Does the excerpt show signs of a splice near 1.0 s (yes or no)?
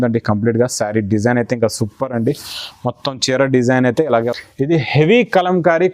no